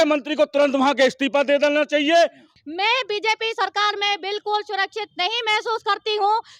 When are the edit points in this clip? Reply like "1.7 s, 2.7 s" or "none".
2.5 s